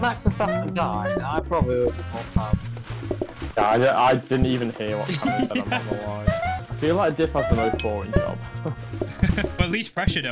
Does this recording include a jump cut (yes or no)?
yes